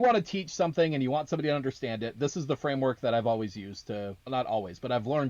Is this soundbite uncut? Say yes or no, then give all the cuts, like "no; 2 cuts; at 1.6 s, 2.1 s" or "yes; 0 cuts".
yes; 0 cuts